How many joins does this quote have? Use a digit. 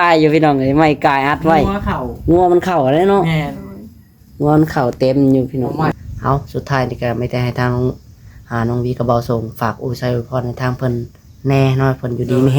1